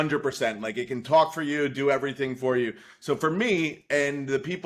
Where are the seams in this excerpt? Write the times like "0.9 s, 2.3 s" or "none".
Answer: none